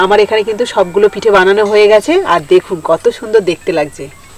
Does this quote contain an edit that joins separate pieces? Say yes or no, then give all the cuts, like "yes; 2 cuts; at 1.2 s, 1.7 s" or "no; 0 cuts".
no; 0 cuts